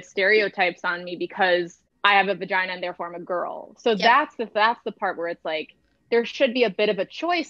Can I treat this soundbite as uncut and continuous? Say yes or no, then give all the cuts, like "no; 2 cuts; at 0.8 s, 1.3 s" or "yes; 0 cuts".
no; 1 cut; at 1.8 s